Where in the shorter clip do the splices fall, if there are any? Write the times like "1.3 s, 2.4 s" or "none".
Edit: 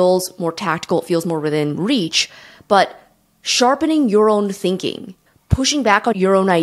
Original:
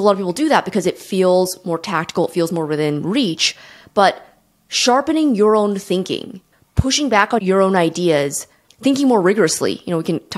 none